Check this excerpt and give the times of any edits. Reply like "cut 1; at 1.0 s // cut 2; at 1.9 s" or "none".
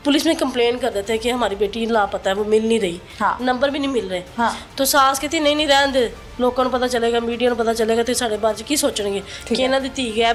none